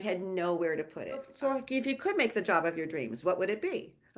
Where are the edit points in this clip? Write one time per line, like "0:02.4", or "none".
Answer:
0:01.3